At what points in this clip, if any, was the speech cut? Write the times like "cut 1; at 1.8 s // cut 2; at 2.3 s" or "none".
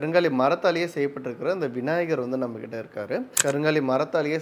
cut 1; at 3.3 s